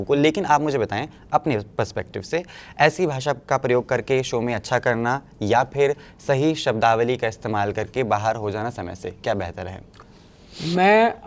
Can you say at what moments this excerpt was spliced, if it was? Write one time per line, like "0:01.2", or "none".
none